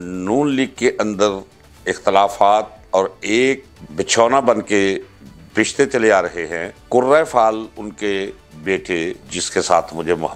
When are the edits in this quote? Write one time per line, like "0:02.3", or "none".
0:03.8